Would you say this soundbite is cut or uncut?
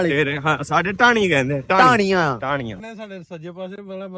cut